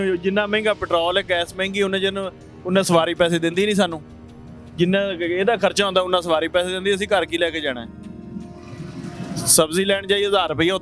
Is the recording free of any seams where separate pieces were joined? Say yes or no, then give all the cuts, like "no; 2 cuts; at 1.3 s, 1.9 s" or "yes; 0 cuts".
yes; 0 cuts